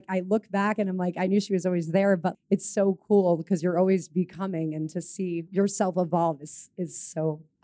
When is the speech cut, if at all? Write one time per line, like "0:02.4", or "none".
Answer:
0:02.3
0:05.5